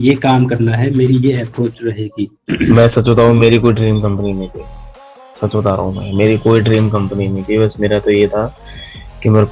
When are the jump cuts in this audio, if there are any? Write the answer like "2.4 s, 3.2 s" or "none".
2.4 s